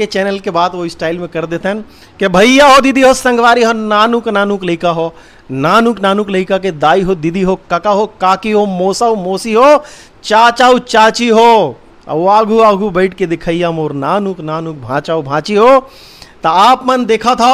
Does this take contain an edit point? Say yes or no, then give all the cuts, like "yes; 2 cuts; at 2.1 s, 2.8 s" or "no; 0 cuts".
no; 0 cuts